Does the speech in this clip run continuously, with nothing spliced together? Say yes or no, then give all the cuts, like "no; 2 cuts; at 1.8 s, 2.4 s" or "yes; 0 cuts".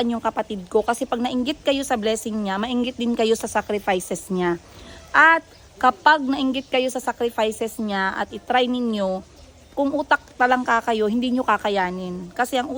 yes; 0 cuts